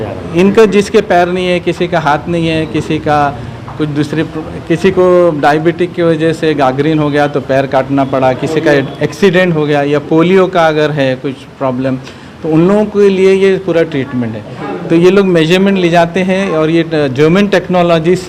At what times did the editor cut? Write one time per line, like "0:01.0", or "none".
none